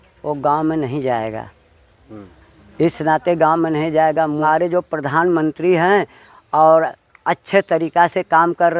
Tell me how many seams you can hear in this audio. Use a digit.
1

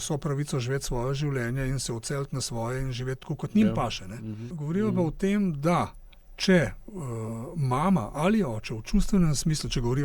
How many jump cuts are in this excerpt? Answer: 1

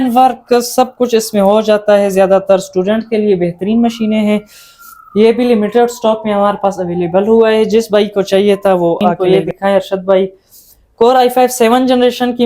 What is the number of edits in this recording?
1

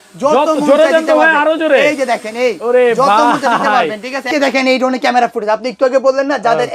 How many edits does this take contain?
1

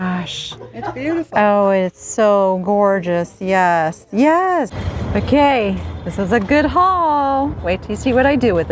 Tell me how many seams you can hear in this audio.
1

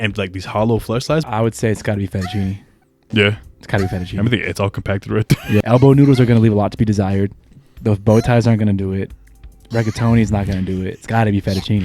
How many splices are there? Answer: 2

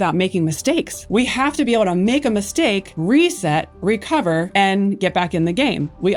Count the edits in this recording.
0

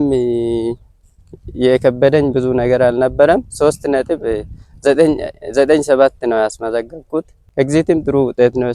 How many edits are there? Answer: 1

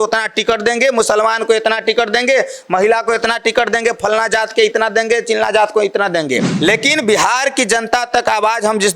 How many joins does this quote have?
1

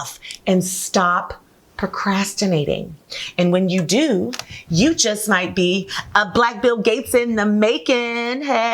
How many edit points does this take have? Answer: 1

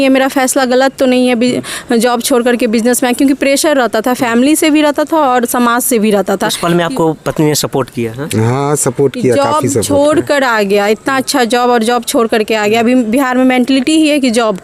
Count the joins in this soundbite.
0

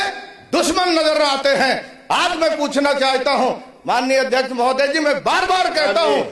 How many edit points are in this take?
0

